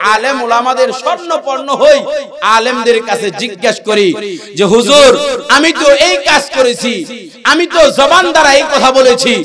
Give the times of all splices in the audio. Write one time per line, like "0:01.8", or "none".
none